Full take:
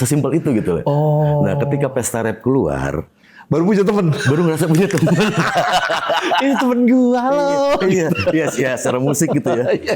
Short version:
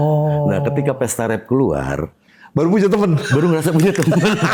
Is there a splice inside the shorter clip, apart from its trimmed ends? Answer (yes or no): no